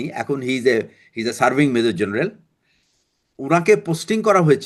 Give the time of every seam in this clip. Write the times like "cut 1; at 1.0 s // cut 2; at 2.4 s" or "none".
none